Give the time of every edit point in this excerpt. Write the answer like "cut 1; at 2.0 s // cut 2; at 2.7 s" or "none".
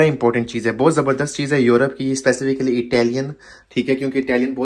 none